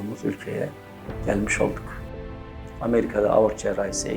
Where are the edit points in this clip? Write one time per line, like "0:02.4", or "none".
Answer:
0:02.2